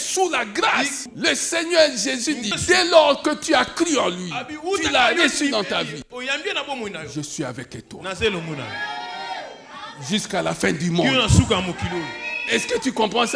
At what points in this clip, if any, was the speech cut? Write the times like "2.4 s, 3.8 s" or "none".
1.1 s, 2.5 s